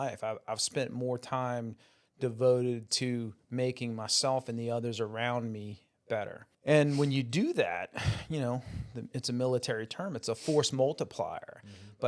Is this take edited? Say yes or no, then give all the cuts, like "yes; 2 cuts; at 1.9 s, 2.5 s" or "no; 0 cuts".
yes; 1 cut; at 6.5 s